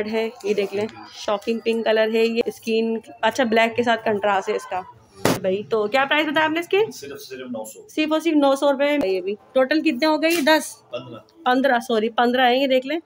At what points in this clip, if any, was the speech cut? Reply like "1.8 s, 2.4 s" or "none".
2.4 s, 5.4 s, 9.0 s